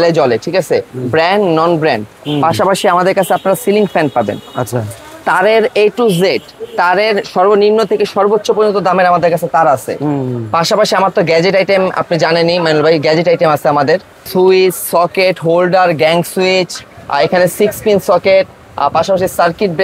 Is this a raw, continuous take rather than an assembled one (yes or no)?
no